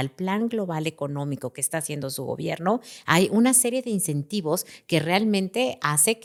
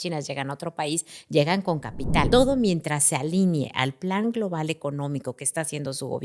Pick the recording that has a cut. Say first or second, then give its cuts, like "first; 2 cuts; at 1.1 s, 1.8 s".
second; 1 cut; at 2.3 s